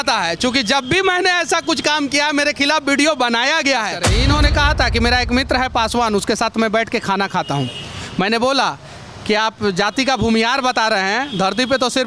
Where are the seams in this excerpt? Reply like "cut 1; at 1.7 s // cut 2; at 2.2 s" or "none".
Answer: cut 1; at 4.0 s